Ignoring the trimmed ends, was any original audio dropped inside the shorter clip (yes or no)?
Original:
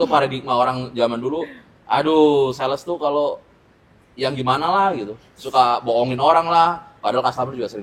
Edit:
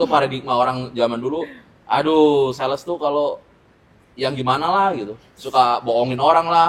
no